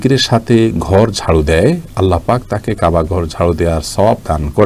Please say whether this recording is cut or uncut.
uncut